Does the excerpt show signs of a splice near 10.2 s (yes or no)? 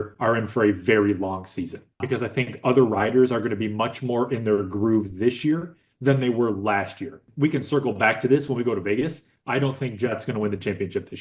no